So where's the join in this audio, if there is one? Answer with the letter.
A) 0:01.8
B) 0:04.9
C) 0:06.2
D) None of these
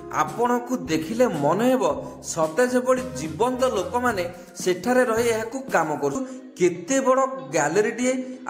C